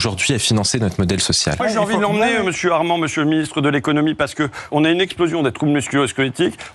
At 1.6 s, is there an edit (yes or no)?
yes